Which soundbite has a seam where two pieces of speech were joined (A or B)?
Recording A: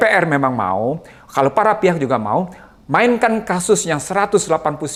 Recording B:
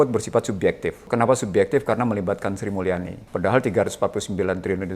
B